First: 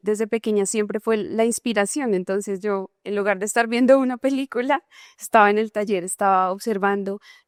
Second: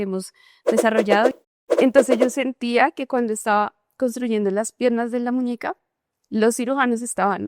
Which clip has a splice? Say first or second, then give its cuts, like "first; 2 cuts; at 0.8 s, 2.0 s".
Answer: second; 1 cut; at 1.4 s